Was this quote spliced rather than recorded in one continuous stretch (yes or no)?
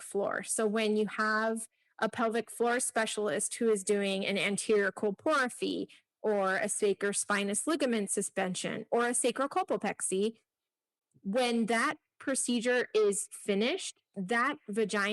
no